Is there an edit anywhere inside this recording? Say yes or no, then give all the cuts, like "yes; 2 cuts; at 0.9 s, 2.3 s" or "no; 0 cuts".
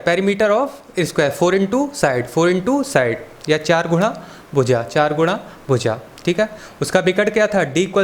no; 0 cuts